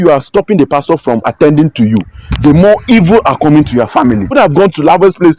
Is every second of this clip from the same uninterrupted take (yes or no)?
no